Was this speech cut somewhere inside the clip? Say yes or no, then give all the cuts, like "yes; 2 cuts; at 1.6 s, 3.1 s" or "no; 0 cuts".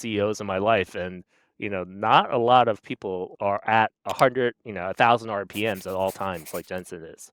yes; 1 cut; at 3.3 s